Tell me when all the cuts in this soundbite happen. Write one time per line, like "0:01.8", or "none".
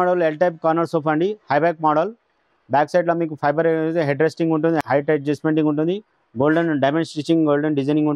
none

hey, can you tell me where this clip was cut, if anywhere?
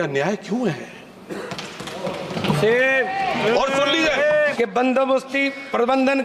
0:04.5

